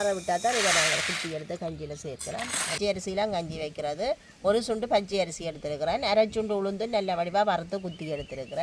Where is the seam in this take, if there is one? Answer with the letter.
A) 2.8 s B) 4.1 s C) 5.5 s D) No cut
A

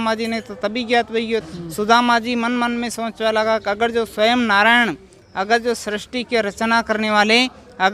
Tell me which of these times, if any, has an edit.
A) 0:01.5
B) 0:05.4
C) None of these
A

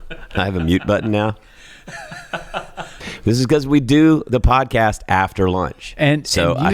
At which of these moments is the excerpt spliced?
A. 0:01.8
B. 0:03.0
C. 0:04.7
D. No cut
B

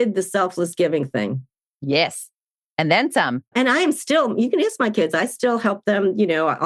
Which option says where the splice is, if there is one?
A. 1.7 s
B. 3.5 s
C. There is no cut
B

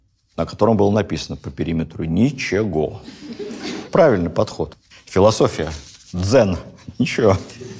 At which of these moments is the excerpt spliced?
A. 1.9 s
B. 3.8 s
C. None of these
B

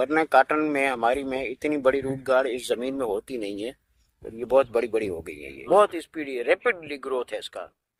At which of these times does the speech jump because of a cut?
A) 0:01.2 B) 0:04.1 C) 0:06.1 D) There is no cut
D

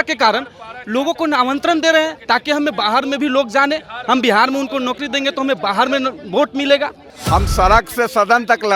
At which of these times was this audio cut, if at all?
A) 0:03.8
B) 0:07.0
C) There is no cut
B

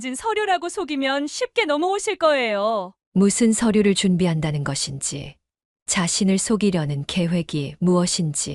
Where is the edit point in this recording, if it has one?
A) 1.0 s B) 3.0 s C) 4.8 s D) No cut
B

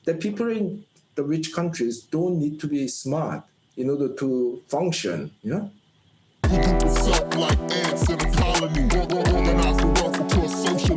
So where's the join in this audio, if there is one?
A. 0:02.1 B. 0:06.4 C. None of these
B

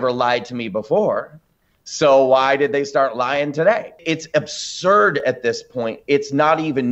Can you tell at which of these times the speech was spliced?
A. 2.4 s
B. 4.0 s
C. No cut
B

